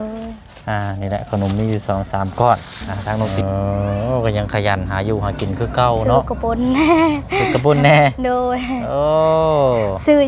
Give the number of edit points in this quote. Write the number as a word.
one